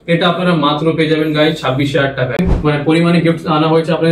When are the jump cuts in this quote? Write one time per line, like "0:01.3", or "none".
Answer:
0:02.4